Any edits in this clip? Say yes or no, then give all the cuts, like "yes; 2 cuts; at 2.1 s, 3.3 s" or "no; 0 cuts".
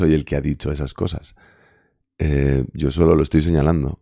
no; 0 cuts